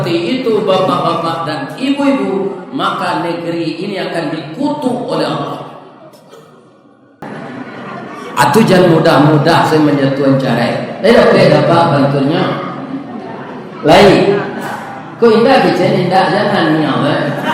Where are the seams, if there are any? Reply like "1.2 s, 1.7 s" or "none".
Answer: 7.2 s